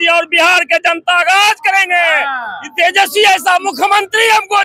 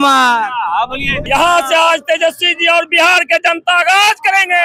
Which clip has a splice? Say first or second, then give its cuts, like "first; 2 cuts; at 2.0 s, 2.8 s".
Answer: second; 1 cut; at 1.3 s